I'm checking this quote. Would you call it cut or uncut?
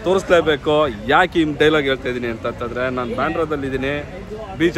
uncut